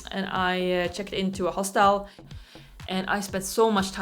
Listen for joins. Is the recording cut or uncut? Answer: cut